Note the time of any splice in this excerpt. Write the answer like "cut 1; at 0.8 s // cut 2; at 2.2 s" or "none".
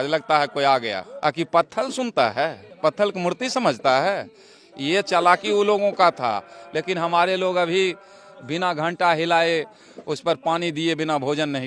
none